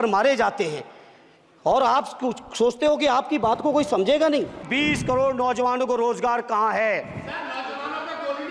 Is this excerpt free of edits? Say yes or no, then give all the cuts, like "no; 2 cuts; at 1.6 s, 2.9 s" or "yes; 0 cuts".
no; 1 cut; at 4.7 s